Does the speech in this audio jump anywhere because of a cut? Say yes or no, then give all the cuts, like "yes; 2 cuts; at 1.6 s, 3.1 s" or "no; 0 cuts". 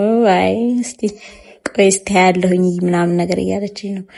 no; 0 cuts